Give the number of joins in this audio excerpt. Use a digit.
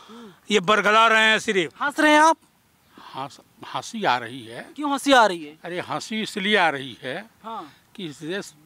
1